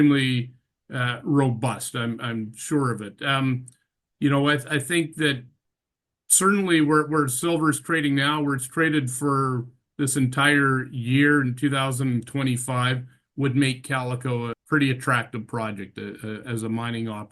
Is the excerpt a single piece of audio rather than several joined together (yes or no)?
no